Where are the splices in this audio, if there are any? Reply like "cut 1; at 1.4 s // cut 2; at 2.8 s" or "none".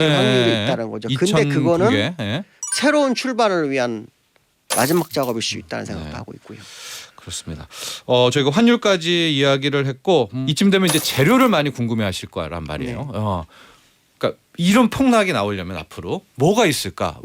cut 1; at 10.4 s